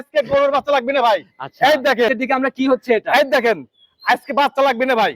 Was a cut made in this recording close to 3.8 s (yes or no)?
no